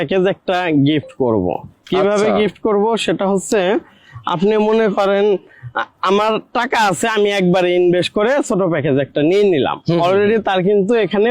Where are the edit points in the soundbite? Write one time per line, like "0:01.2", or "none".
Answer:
none